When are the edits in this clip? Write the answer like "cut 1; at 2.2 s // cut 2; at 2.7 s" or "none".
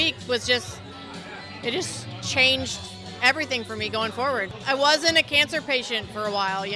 cut 1; at 4.5 s